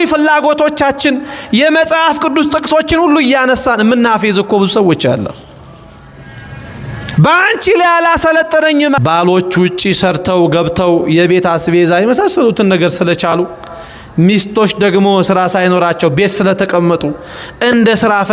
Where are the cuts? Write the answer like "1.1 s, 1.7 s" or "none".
9.0 s

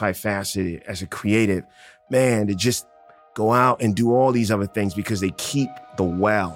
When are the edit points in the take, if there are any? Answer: none

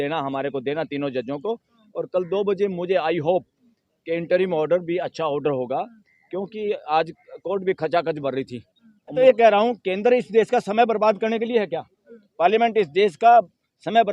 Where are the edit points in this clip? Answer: 9.1 s

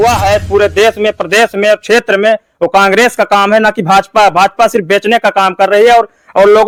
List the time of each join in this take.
none

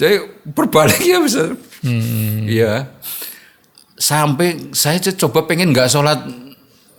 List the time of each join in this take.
none

